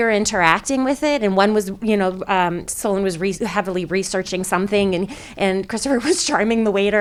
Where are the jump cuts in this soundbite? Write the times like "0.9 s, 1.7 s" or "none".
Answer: none